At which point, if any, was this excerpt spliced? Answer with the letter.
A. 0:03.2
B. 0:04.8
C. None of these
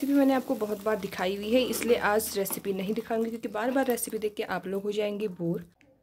C